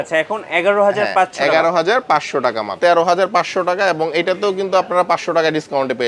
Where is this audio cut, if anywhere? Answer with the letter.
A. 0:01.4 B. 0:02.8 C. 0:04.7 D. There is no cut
B